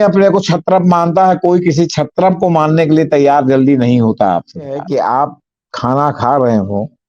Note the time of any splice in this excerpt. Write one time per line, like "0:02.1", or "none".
0:04.8